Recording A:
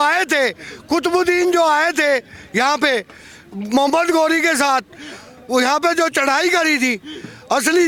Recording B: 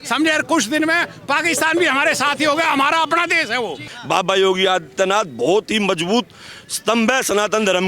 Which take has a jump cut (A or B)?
B